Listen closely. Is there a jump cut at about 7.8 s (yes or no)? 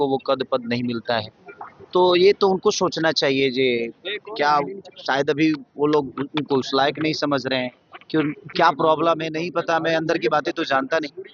no